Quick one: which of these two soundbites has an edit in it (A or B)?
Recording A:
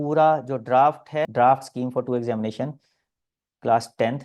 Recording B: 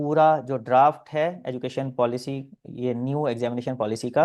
A